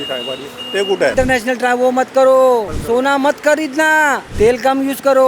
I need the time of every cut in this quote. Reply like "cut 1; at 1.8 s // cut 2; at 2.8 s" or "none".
cut 1; at 1.1 s // cut 2; at 2.7 s // cut 3; at 4.2 s

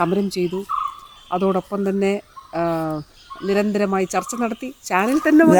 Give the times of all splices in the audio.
none

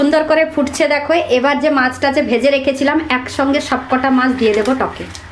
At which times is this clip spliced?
none

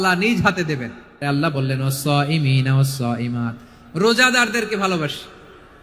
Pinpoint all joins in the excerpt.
cut 1; at 1.2 s

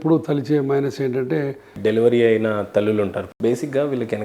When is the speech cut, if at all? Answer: cut 1; at 1.7 s // cut 2; at 3.2 s

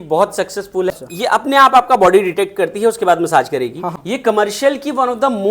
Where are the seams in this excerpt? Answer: cut 1; at 0.9 s // cut 2; at 3.9 s

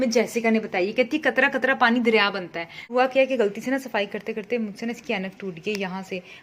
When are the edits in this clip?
cut 1; at 2.9 s

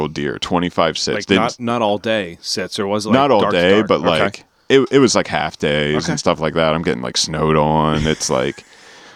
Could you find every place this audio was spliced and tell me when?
none

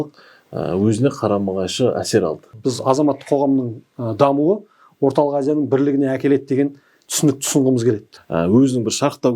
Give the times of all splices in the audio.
cut 1; at 2.5 s // cut 2; at 8.1 s

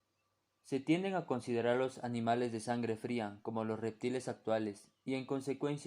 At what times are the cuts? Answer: cut 1; at 2.5 s

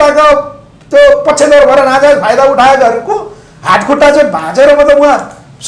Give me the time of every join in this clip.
none

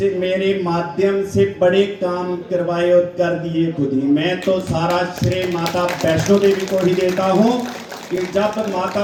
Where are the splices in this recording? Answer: none

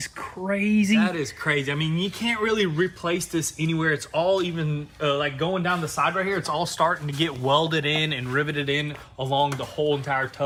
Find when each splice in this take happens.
none

